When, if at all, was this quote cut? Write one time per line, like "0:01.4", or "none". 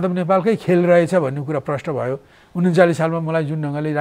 none